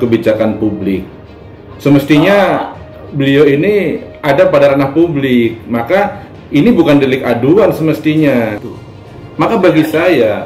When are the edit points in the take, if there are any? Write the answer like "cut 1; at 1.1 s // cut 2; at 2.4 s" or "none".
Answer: cut 1; at 8.6 s